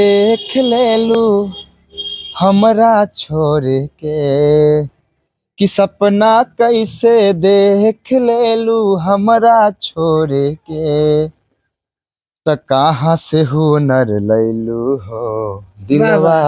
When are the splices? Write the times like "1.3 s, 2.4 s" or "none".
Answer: none